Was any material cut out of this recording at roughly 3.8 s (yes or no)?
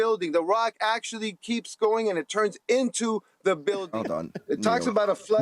yes